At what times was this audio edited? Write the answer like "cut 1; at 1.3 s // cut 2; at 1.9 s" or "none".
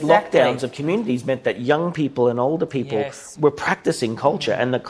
cut 1; at 3.2 s

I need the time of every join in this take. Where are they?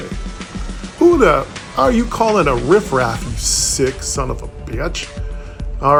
none

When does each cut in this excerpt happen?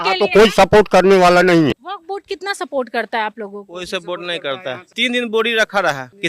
cut 1; at 1.8 s

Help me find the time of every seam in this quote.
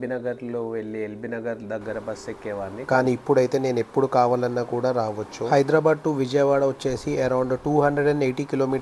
cut 1; at 2.9 s // cut 2; at 5.4 s

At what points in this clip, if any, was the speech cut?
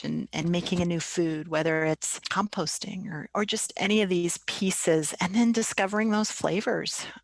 none

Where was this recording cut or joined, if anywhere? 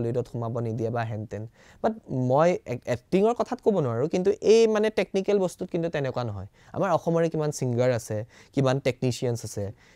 none

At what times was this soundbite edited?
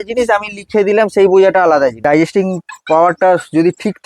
cut 1; at 2.0 s

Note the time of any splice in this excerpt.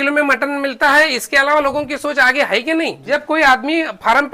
cut 1; at 3.0 s

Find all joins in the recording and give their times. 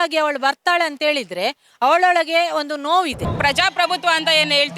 cut 1; at 3.2 s

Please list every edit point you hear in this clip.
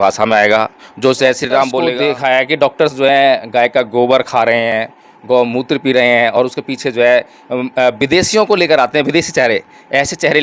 cut 1; at 1.8 s

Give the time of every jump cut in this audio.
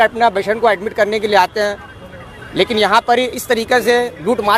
none

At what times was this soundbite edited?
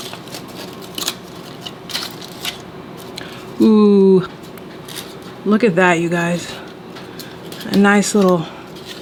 none

